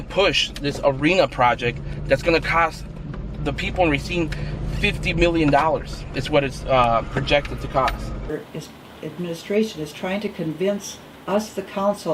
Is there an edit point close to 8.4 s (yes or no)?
yes